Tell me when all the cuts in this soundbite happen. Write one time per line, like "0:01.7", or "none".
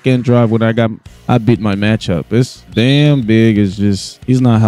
0:02.7